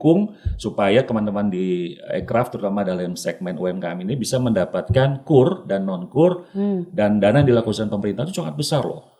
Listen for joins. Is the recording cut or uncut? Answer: uncut